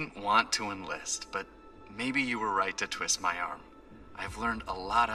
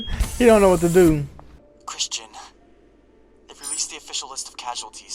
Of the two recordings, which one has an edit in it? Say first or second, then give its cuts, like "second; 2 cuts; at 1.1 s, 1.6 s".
second; 1 cut; at 1.6 s